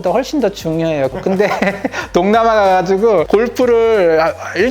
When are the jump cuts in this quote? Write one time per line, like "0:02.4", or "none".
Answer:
0:01.1